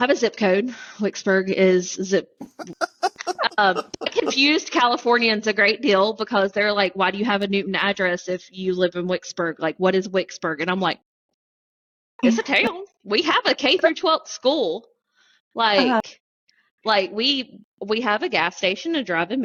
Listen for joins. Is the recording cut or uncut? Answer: uncut